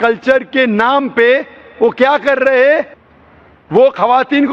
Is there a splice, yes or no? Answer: no